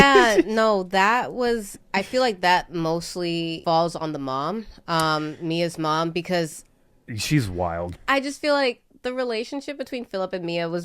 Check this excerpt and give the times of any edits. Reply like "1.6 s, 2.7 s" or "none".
8.0 s

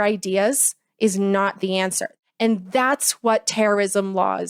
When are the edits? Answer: 2.1 s

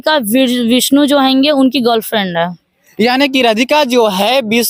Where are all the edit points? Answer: none

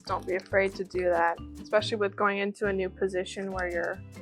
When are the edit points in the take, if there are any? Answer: 1.5 s

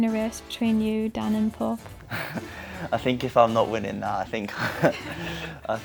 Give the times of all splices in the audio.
none

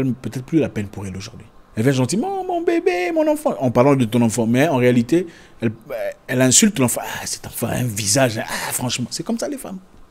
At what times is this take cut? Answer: 1.6 s

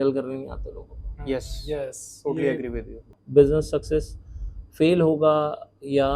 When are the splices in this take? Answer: 3.1 s

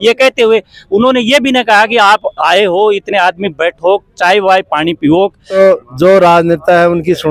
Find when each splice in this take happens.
5.6 s

